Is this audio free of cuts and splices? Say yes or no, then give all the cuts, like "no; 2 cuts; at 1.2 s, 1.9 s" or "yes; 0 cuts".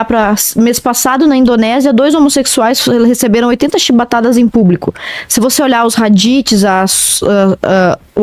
yes; 0 cuts